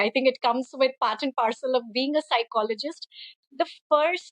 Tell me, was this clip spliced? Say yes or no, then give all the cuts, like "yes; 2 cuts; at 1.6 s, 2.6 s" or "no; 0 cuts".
yes; 1 cut; at 3.4 s